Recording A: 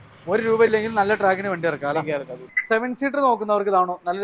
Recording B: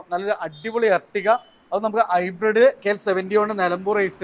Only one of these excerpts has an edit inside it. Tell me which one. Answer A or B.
A